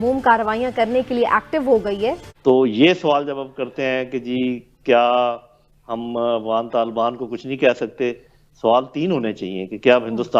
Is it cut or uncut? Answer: cut